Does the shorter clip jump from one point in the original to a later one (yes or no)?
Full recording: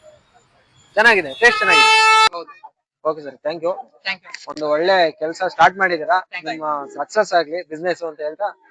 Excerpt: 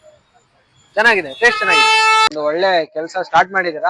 yes